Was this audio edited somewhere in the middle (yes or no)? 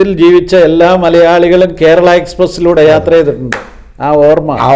no